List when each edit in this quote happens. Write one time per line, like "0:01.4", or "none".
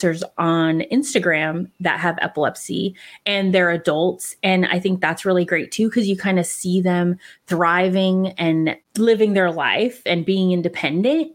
none